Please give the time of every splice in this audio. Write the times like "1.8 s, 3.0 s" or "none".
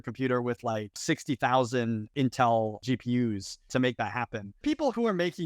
1.0 s, 2.1 s, 3.1 s, 4.6 s

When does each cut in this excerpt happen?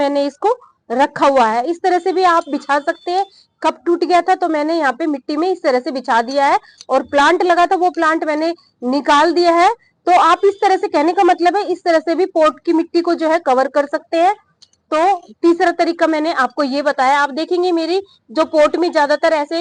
none

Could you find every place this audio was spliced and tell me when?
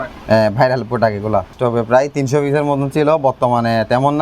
1.5 s

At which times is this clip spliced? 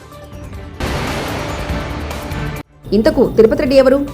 0.8 s, 2.7 s

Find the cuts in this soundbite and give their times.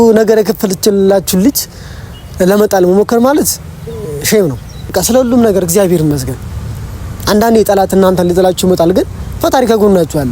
4.9 s

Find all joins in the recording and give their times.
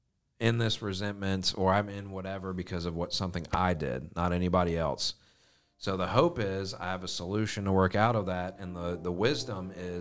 none

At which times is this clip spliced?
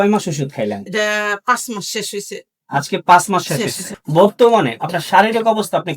3.9 s

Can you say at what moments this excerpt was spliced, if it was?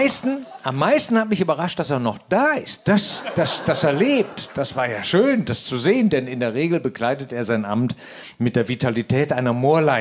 4.4 s

